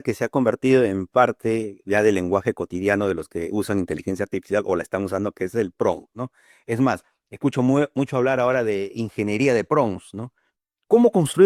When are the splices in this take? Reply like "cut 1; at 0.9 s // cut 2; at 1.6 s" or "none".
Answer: none